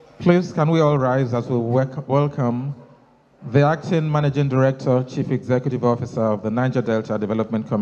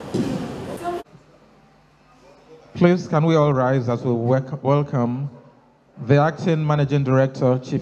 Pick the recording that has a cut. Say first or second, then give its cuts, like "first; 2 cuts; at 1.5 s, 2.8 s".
second; 1 cut; at 1.0 s